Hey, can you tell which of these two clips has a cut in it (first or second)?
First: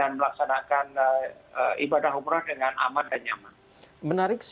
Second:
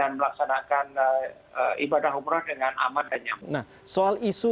second